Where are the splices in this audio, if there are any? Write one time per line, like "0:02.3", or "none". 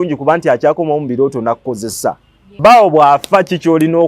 0:02.6